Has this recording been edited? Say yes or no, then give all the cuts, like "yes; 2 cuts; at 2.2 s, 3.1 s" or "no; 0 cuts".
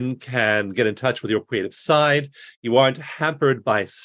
no; 0 cuts